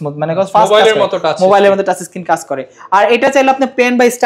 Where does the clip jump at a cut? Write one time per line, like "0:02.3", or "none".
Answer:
none